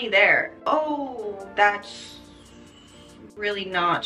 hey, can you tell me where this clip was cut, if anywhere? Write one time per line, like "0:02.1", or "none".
none